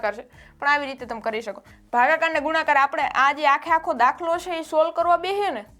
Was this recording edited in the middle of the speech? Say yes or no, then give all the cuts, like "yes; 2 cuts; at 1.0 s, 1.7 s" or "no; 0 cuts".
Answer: yes; 1 cut; at 1.7 s